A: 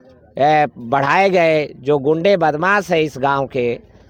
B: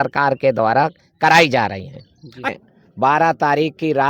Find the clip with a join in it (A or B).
B